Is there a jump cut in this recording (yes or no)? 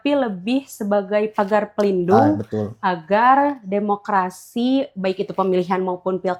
no